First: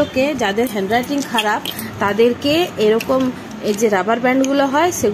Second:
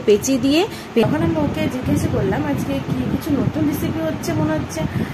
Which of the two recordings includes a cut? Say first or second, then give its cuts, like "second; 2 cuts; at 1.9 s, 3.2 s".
second; 1 cut; at 1.0 s